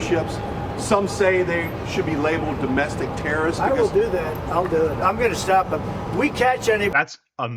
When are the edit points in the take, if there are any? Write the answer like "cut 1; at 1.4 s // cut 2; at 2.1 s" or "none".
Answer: none